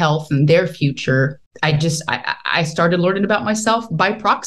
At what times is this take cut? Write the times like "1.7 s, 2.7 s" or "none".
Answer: 1.4 s